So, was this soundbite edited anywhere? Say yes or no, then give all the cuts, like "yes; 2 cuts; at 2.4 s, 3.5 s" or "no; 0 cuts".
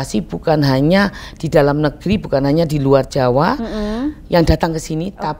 no; 0 cuts